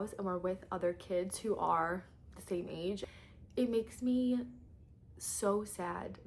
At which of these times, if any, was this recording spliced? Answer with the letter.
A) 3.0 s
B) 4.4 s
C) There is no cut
A